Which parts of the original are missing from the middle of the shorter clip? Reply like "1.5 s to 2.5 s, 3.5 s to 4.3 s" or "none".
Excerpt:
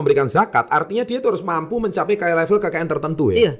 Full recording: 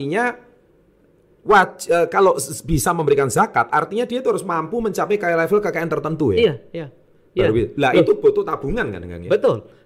none